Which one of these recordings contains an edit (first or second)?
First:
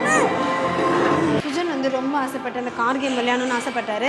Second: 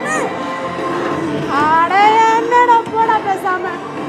first